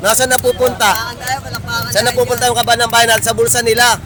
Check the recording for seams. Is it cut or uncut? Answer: uncut